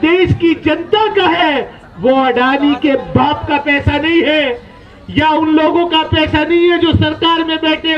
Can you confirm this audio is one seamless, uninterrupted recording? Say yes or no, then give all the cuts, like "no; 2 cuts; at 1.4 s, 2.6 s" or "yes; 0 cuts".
yes; 0 cuts